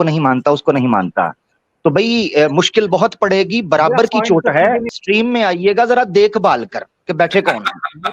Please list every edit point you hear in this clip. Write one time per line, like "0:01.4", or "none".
0:04.9